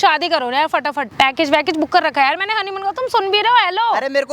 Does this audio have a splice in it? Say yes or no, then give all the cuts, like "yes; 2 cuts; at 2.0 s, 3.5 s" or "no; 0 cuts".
yes; 1 cut; at 1.0 s